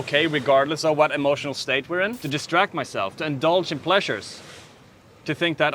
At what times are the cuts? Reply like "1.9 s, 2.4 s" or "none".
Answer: 2.2 s